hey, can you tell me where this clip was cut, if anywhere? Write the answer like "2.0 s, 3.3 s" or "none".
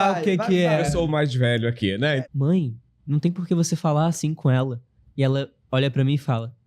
2.2 s